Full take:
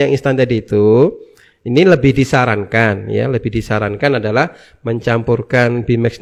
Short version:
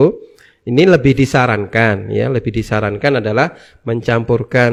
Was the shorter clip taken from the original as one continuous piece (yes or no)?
yes